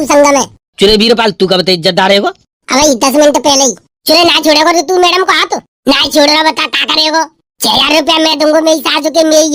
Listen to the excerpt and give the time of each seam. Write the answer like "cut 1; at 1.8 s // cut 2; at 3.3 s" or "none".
none